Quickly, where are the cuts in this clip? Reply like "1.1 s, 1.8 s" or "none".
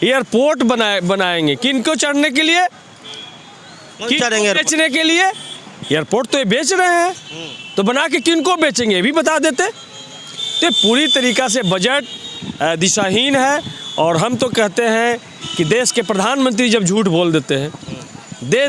none